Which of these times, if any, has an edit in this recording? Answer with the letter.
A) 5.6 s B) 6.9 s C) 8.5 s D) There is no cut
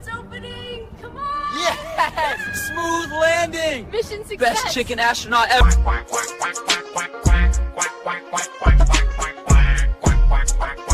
A